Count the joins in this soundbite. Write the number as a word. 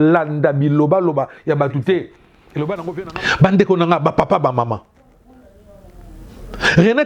one